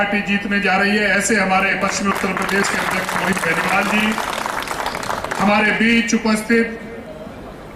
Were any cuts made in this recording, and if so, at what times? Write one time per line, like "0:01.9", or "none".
none